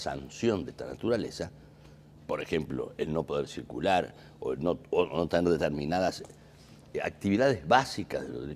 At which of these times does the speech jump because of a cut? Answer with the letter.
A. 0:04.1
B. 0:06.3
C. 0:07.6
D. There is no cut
B